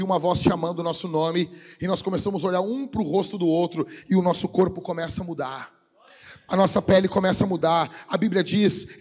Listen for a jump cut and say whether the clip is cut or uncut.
uncut